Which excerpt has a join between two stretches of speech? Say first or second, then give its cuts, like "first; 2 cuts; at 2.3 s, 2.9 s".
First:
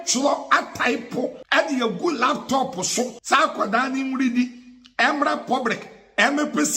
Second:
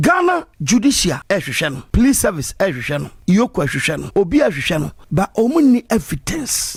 first; 2 cuts; at 1.4 s, 3.2 s